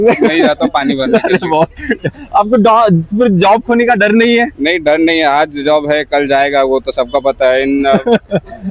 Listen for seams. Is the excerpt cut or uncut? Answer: uncut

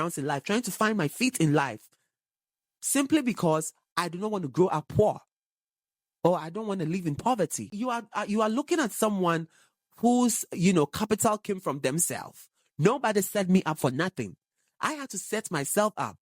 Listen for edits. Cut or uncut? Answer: cut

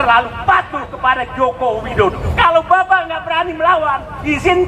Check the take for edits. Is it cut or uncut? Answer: cut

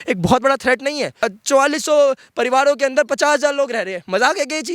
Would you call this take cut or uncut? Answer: cut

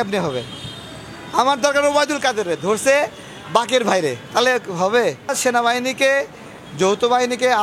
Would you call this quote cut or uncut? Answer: cut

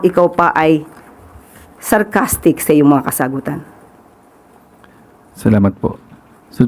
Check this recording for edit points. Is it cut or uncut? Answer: uncut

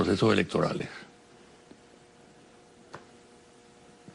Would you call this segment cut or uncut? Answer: cut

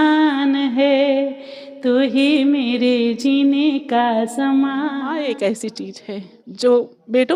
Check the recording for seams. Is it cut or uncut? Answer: cut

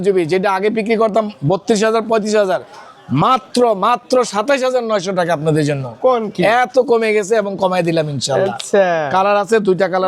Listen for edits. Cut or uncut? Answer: uncut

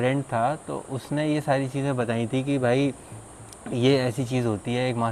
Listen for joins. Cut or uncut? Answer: uncut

